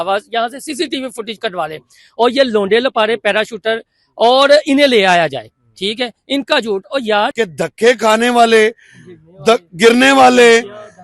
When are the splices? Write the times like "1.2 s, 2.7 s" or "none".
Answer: 7.3 s